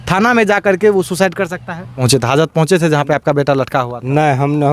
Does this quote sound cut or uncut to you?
cut